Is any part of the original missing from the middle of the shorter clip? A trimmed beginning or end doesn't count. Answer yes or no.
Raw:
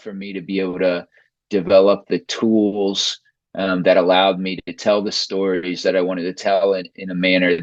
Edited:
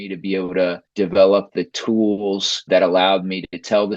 yes